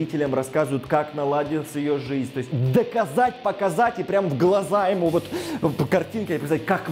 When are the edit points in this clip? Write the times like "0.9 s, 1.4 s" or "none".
2.5 s